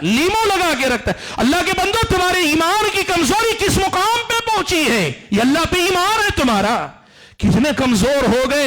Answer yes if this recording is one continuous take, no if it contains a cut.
yes